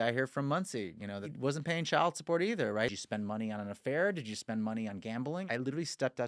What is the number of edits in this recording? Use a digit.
3